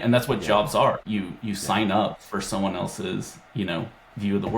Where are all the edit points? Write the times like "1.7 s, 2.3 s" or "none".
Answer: 1.0 s